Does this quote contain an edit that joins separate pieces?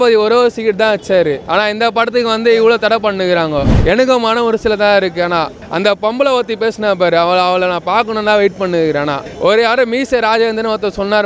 yes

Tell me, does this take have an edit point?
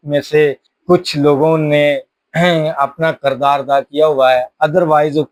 no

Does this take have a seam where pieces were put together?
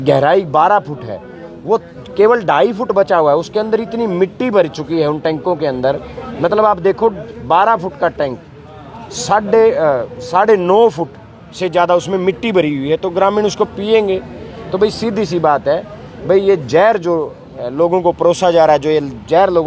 no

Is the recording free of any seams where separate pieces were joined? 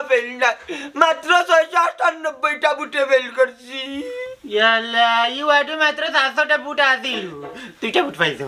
yes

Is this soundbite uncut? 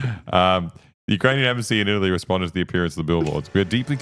yes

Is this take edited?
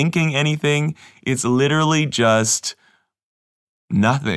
no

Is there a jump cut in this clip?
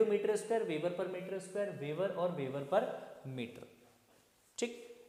no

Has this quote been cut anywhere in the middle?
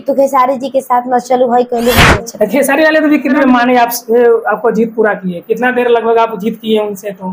yes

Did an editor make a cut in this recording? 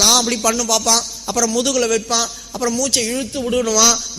no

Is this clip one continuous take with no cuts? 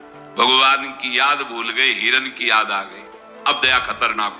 yes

